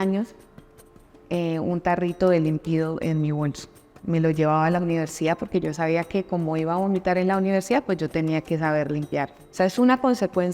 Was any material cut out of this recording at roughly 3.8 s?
no; 1 cut; at 9.4 s

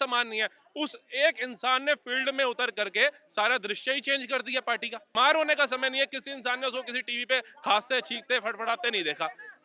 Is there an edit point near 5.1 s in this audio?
yes; 1 cut; at 5.1 s

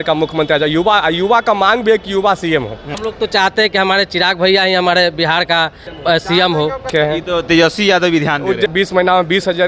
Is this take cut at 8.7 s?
yes; 4 cuts; at 3.0 s, 5.9 s, 6.9 s, 8.7 s

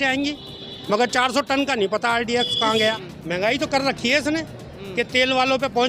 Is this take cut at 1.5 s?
no; 1 cut; at 3.0 s

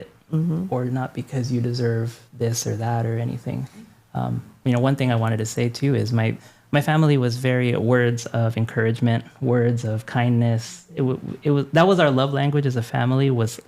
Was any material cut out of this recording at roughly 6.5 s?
yes; 2 cuts; at 3.9 s, 6.5 s

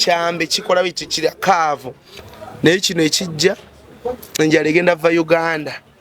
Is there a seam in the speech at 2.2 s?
yes; 1 cut; at 2.2 s

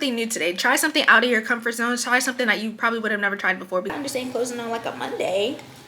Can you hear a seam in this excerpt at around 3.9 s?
yes; 1 cut; at 3.9 s

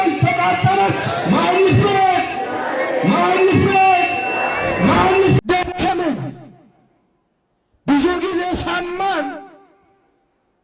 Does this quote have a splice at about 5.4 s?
yes; 1 cut; at 5.4 s

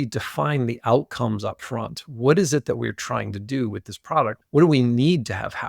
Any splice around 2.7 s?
no; 1 cut; at 4.4 s

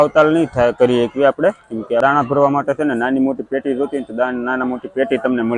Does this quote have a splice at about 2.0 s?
yes; 1 cut; at 2.0 s

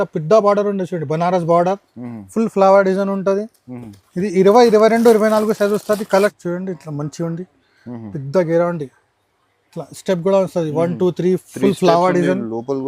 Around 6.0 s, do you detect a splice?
yes; 1 cut; at 6.0 s

